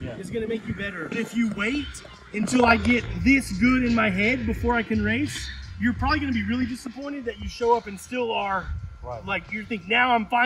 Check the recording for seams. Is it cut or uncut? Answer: cut